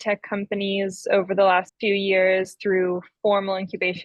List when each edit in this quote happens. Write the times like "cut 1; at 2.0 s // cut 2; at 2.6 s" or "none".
cut 1; at 1.7 s